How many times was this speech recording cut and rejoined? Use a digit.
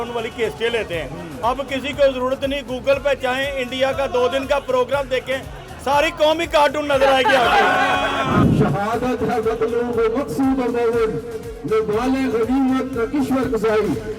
1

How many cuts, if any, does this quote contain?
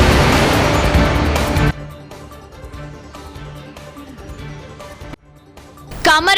1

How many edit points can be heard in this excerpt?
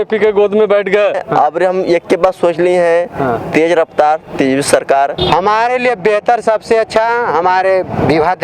2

